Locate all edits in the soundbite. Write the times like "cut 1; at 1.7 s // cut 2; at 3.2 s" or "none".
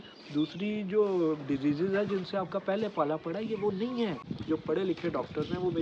cut 1; at 4.3 s